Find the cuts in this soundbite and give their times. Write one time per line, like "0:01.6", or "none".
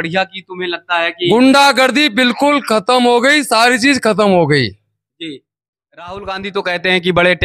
0:05.7